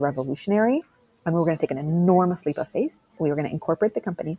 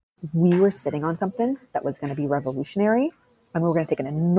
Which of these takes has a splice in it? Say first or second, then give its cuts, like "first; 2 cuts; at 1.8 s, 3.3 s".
first; 1 cut; at 3.2 s